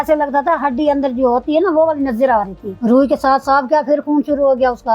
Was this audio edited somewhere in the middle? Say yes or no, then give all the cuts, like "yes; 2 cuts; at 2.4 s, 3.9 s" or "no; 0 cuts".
no; 0 cuts